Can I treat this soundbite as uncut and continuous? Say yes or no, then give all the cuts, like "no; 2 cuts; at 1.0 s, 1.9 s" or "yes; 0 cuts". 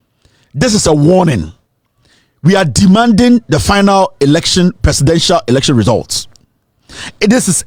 yes; 0 cuts